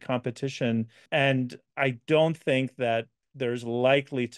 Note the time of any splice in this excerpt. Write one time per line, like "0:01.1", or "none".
0:01.0

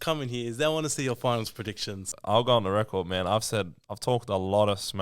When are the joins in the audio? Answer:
0:02.1

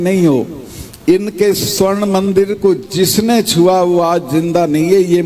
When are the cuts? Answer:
none

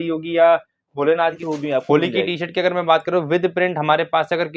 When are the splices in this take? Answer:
0:01.4

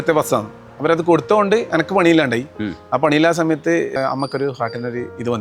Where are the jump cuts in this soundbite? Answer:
0:04.0

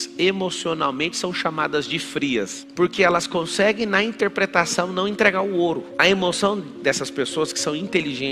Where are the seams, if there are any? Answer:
0:02.6

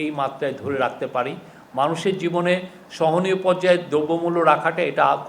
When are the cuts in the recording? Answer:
none

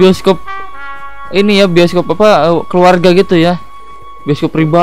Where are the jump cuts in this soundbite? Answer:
none

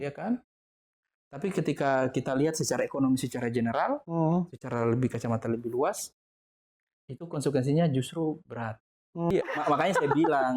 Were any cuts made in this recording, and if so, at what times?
0:09.3

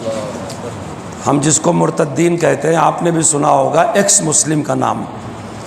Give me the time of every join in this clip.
none

